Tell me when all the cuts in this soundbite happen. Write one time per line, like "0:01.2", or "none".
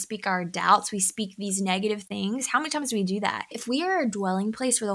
0:03.5

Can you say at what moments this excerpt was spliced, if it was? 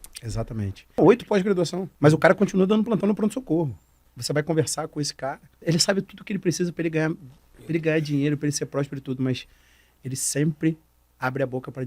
0:00.9
0:01.8
0:04.1
0:05.5

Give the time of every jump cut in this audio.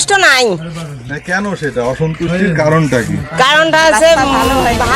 none

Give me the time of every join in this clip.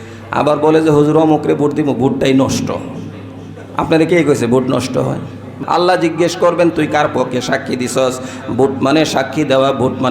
0:05.5

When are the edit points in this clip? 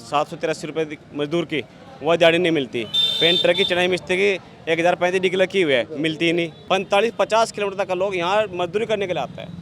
0:06.6

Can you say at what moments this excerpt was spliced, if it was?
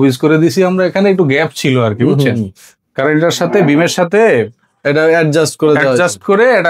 none

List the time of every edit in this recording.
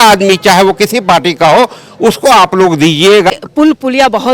0:03.3

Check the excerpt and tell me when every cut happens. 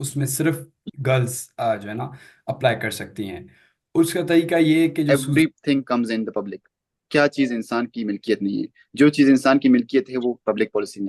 0:05.1

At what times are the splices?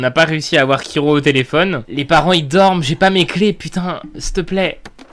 0:01.9

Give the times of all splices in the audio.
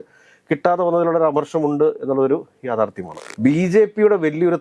0:03.3

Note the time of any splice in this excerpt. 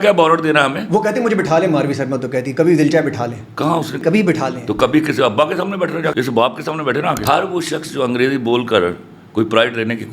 0:04.0
0:06.1
0:07.2

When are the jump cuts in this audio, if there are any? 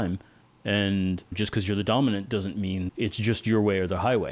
0:02.9

